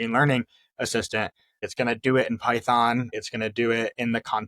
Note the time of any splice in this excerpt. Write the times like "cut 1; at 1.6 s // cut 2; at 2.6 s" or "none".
cut 1; at 1.7 s // cut 2; at 3.2 s